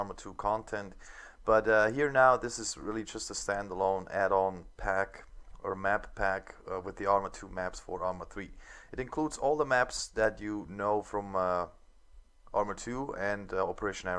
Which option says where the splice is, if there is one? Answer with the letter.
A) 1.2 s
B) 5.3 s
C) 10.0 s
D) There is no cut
C